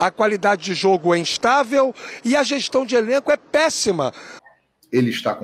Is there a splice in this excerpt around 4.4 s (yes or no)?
yes